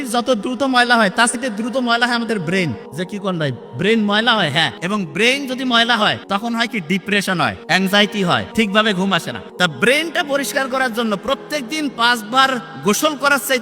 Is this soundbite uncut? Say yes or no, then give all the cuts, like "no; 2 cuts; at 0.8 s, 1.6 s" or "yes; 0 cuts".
no; 7 cuts; at 1.4 s, 2.8 s, 4.8 s, 6.2 s, 7.6 s, 8.5 s, 9.4 s